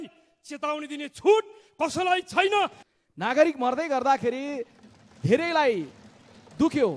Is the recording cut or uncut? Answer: cut